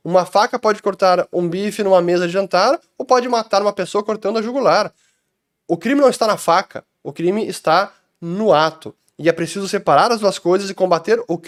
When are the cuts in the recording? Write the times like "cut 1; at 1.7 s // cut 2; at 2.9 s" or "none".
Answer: none